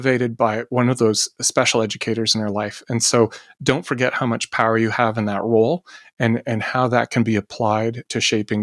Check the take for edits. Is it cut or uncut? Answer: uncut